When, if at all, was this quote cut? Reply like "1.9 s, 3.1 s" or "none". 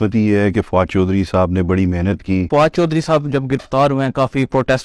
2.5 s